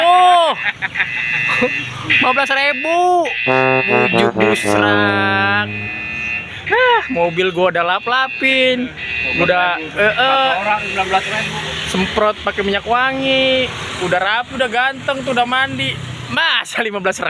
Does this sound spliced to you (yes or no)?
no